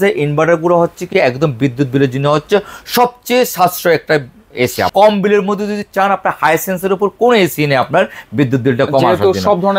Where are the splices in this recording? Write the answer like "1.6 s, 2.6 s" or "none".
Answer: 4.9 s